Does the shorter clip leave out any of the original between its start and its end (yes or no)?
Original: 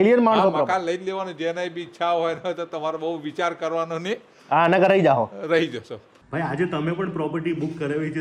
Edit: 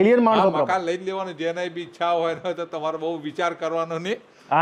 no